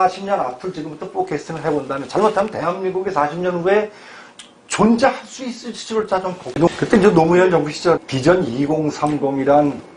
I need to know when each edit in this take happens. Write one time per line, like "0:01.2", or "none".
0:06.5